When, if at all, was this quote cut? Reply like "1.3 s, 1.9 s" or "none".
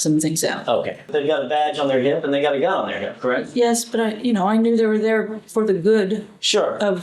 1.0 s